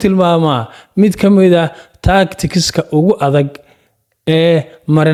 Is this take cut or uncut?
uncut